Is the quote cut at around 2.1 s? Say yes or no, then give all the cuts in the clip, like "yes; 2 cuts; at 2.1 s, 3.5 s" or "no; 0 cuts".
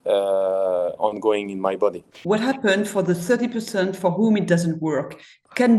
yes; 1 cut; at 2.1 s